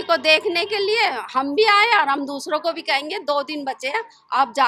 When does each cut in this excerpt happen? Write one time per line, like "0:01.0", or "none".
none